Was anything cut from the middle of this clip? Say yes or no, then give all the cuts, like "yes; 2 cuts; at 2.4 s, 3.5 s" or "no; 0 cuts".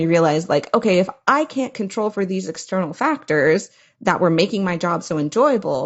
no; 0 cuts